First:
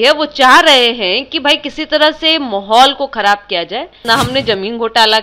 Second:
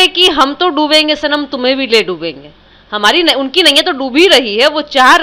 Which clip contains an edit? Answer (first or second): first